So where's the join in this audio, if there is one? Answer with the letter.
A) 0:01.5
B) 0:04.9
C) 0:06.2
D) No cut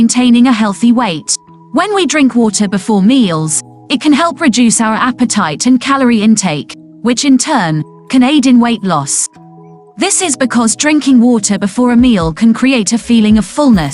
D